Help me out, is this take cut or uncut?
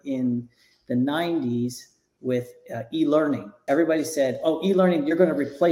cut